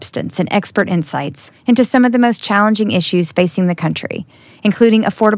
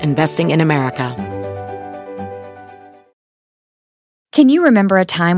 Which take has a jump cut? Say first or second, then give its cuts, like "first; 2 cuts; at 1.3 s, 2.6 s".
second; 1 cut; at 1.1 s